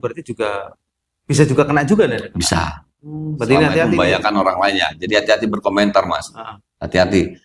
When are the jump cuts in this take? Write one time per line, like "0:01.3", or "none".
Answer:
none